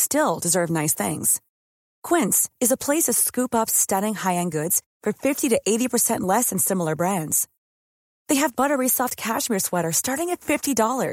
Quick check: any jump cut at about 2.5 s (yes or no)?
no